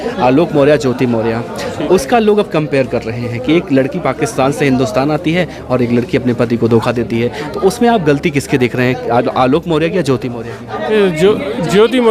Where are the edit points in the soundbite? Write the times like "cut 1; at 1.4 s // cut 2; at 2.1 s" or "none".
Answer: none